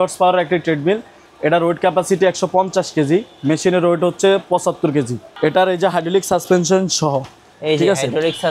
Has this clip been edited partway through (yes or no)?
yes